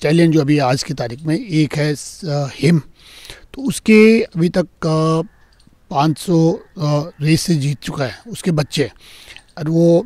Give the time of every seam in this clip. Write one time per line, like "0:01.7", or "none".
none